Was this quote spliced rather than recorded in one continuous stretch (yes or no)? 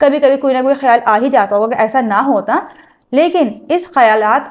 no